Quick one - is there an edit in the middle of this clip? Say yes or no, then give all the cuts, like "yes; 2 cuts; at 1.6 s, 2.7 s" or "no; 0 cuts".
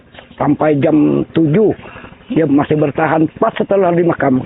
no; 0 cuts